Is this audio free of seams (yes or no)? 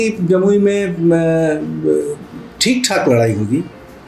yes